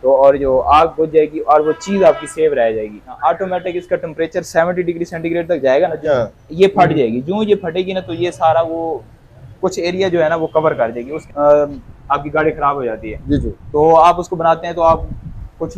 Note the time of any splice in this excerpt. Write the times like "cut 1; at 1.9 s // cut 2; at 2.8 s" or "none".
cut 1; at 3.1 s // cut 2; at 6.1 s // cut 3; at 11.1 s